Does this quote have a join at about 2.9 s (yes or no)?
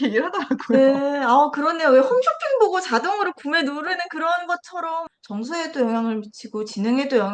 no